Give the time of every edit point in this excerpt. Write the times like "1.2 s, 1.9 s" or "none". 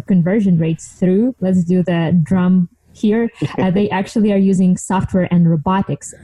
1.4 s